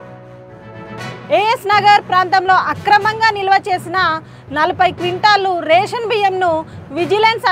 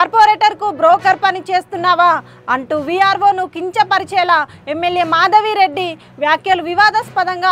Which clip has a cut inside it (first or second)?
first